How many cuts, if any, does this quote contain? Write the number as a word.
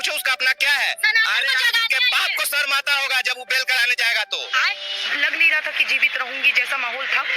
one